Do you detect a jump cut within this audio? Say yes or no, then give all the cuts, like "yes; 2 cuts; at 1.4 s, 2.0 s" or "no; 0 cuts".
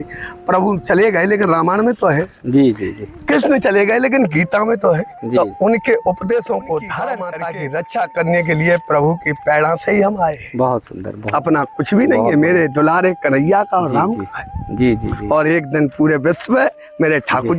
yes; 1 cut; at 7.3 s